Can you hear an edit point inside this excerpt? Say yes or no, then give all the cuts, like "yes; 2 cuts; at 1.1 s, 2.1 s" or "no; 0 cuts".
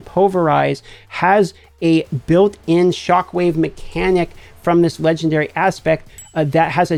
no; 0 cuts